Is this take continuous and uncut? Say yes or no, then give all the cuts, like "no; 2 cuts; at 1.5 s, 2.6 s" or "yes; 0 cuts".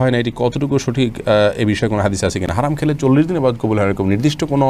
yes; 0 cuts